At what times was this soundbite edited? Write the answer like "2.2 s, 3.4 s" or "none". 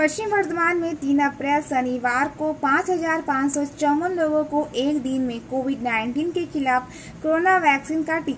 none